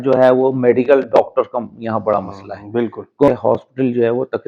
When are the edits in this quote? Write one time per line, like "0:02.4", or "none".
0:03.3